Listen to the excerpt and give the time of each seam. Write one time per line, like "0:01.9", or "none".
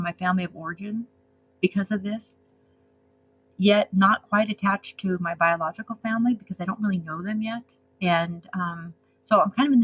none